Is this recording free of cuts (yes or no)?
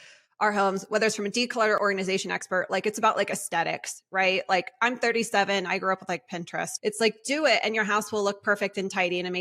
no